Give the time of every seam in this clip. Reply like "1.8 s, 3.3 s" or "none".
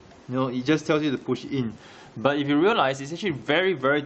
3.1 s